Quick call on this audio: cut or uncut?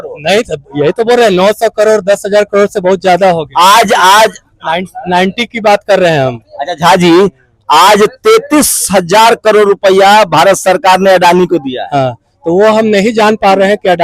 uncut